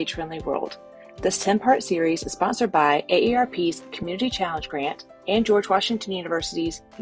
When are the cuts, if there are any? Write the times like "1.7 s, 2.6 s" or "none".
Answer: none